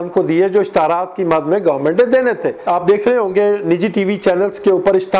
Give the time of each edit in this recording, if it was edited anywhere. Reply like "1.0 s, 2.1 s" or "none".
2.6 s